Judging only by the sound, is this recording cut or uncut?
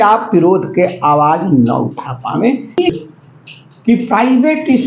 cut